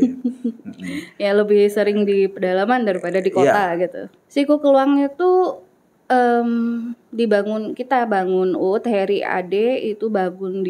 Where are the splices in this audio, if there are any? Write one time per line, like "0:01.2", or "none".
0:04.1